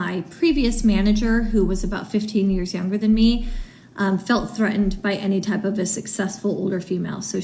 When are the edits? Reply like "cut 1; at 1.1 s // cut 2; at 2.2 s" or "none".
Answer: none